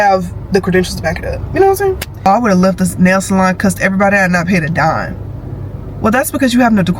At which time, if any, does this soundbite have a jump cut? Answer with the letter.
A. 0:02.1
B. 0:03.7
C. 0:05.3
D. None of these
A